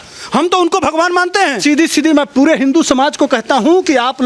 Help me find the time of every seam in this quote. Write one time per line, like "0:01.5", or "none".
0:01.6